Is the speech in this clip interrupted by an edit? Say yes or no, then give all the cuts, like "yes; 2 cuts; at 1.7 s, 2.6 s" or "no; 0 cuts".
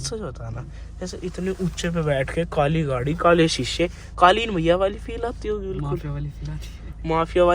no; 0 cuts